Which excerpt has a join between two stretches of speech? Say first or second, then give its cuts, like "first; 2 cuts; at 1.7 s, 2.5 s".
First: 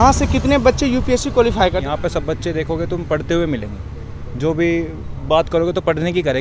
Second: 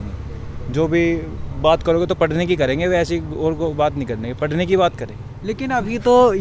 first; 1 cut; at 1.8 s